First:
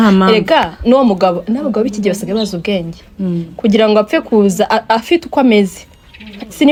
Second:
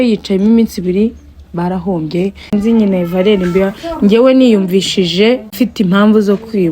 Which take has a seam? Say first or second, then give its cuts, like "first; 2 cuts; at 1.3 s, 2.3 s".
second; 2 cuts; at 2.5 s, 5.5 s